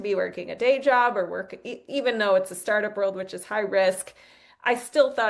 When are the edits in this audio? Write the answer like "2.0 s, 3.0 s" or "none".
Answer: none